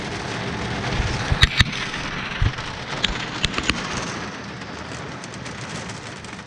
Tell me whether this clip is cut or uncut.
uncut